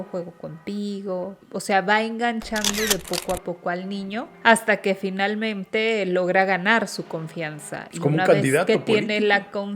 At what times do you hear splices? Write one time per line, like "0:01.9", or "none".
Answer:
0:01.4
0:04.3